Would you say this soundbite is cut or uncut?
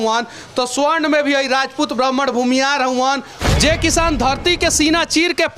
cut